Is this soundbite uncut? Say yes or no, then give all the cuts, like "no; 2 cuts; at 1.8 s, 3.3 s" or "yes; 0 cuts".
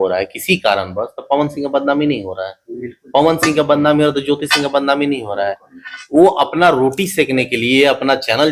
yes; 0 cuts